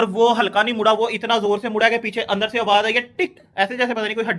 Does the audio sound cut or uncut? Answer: uncut